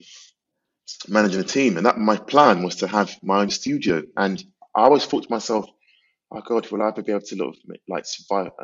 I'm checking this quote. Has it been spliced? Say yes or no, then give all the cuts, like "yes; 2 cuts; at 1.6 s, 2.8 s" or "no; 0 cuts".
no; 0 cuts